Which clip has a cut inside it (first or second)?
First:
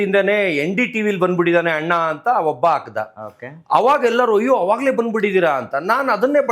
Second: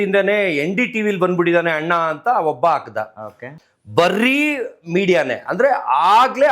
second